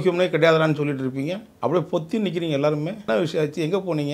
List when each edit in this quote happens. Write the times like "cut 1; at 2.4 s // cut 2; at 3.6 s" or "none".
cut 1; at 1.5 s // cut 2; at 3.0 s